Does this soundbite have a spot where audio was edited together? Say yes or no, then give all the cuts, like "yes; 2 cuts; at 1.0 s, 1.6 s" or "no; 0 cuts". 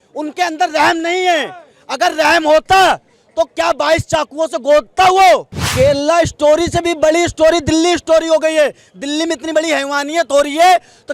yes; 1 cut; at 5.6 s